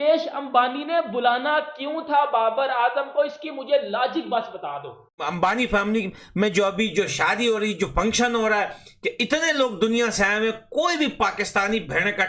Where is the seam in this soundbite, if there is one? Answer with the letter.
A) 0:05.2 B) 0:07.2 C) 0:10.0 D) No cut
A